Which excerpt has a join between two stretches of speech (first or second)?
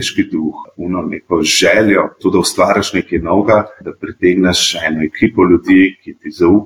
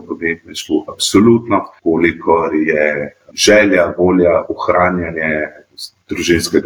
second